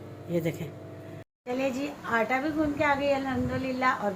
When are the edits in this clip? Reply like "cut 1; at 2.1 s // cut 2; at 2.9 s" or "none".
cut 1; at 1.3 s